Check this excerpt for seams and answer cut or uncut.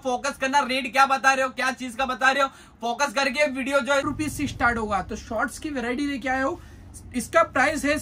cut